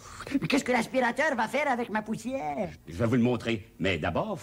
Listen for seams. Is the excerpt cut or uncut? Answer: cut